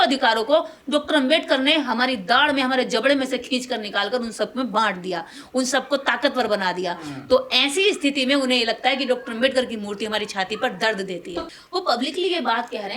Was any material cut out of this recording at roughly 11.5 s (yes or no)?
yes